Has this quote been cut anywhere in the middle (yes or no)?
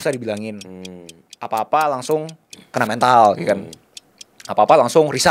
no